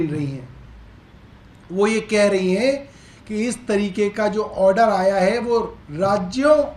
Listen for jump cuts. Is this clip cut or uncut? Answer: uncut